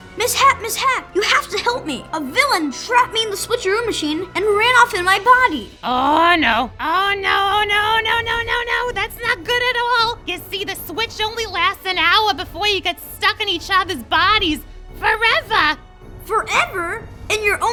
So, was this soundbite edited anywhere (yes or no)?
no